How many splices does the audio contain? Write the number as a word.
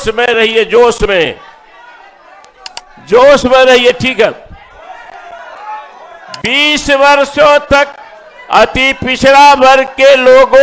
zero